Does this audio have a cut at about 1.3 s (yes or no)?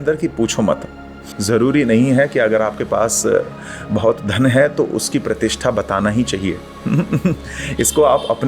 yes